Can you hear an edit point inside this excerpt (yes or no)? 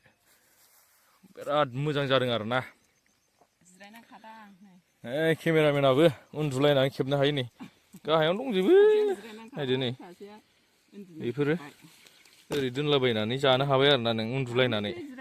no